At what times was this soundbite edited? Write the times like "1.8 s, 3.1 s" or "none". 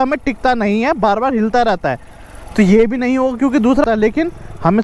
3.8 s